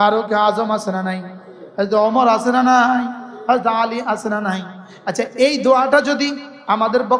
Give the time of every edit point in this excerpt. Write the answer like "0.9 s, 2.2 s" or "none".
none